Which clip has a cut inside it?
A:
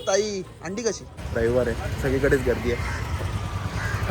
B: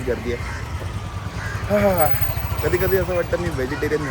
A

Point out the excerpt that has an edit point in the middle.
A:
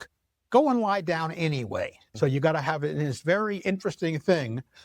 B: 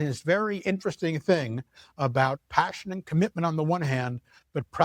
A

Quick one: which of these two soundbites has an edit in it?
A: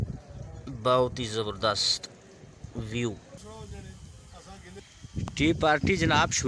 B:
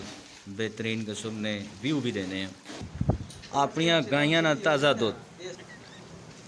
B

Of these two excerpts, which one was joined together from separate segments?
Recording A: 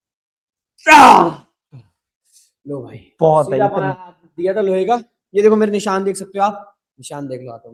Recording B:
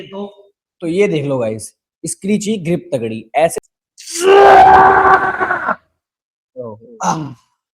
B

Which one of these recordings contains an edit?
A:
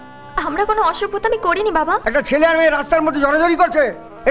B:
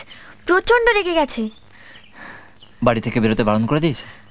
A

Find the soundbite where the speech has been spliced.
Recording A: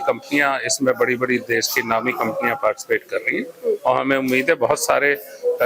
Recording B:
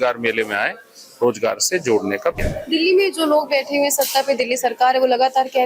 B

